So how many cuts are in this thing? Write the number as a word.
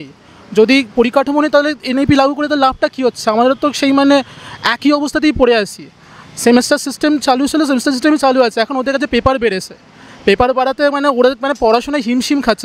zero